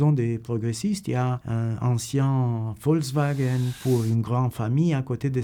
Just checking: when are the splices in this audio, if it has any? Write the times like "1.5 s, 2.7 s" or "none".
none